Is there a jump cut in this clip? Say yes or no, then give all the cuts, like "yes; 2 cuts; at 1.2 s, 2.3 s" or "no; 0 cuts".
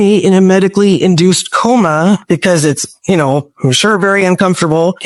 no; 0 cuts